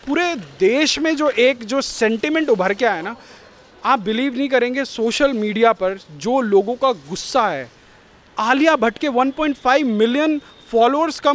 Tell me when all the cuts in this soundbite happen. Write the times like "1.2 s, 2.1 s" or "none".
none